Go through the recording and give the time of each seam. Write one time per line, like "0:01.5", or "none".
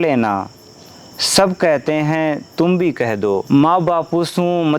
0:03.4